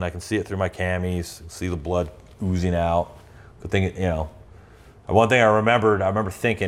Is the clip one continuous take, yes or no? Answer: yes